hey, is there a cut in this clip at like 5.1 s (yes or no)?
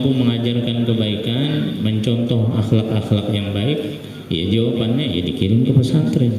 no